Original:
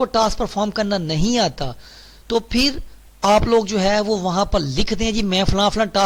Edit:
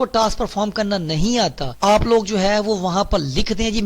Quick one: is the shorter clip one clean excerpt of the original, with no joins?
no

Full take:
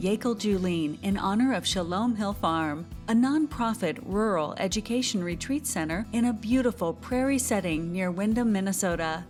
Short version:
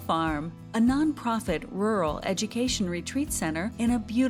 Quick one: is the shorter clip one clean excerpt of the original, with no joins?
yes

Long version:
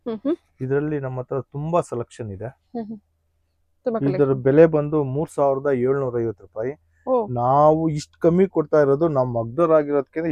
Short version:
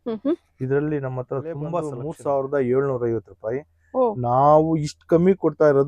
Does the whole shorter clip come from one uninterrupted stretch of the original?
no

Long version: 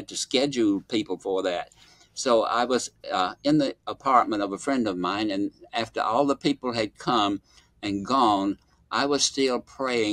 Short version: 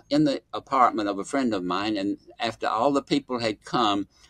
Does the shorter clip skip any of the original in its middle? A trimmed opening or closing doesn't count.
no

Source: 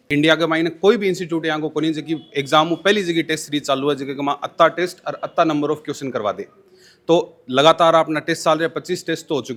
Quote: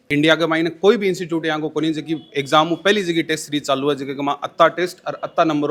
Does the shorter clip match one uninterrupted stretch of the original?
yes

